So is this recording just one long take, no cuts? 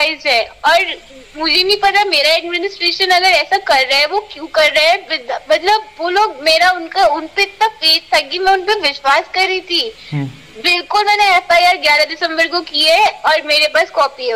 yes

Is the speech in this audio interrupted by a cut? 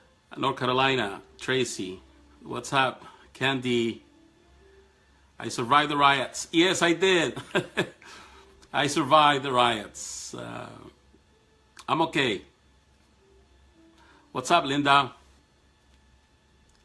yes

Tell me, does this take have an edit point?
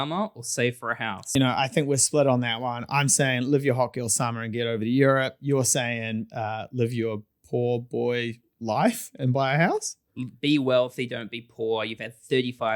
yes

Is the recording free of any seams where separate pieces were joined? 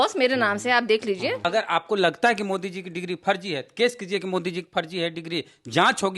no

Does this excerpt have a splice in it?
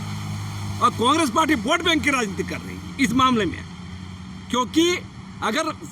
no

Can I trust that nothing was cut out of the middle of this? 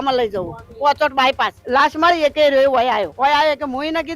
no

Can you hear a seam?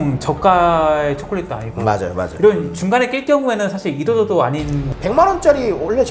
yes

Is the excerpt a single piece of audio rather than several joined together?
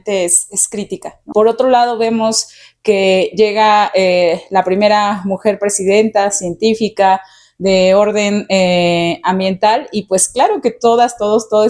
no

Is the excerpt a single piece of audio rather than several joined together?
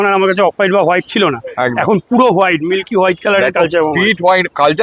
yes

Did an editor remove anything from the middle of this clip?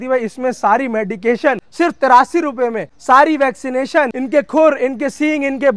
yes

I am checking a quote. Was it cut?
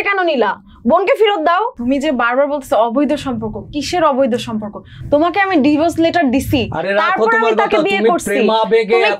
yes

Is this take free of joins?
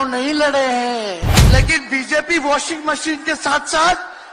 no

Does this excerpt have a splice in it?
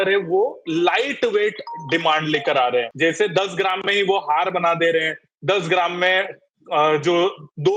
yes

